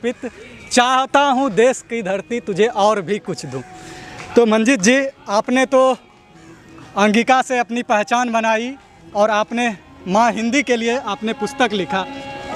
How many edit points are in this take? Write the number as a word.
zero